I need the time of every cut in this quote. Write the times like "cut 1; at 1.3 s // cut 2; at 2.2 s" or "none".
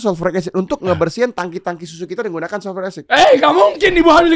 none